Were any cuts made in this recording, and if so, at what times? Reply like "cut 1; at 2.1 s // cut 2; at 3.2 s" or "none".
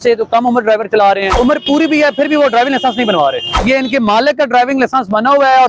cut 1; at 1.3 s // cut 2; at 3.5 s